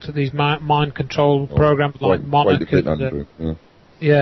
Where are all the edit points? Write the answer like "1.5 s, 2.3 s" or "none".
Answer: none